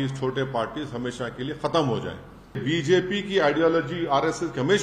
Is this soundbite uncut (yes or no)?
no